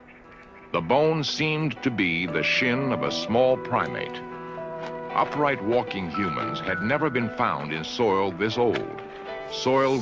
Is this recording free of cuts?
yes; 0 cuts

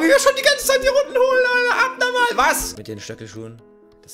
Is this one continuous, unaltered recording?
no; 1 cut; at 2.7 s

